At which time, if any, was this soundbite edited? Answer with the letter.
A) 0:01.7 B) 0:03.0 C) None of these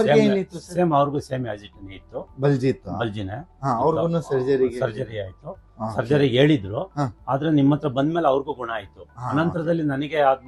C